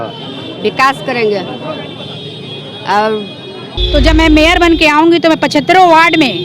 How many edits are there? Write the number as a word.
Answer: two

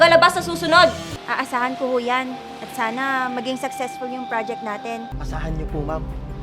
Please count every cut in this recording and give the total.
two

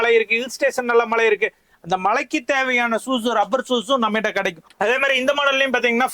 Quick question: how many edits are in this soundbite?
one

